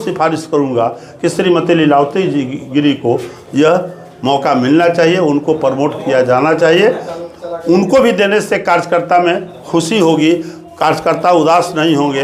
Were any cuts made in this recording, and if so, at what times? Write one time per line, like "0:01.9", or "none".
none

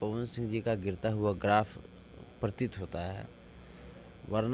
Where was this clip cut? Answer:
none

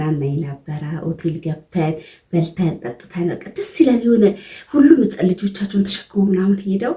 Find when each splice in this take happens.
none

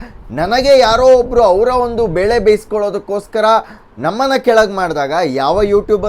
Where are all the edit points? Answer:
none

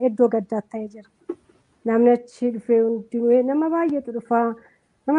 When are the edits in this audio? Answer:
0:02.6

